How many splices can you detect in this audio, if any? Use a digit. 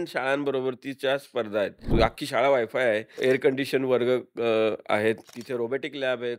3